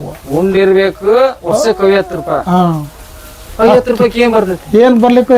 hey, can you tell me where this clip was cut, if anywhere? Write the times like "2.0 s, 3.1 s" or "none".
none